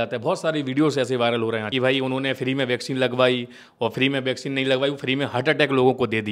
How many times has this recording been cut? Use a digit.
1